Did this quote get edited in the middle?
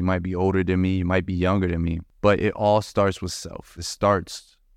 yes; 2 cuts; at 2.0 s, 3.8 s

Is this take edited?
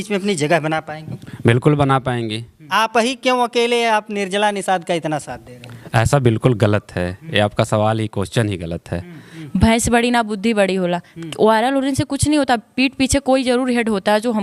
yes; 2 cuts; at 2.6 s, 9.3 s

